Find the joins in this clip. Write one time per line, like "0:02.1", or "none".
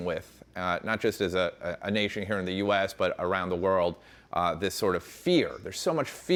none